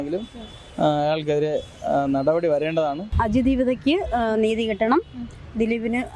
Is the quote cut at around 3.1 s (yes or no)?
yes